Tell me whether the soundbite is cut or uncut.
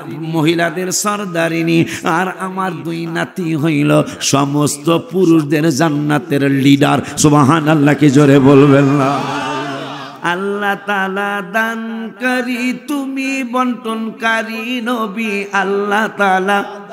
cut